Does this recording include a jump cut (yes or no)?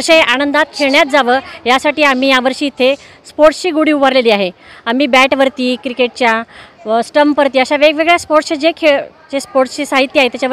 no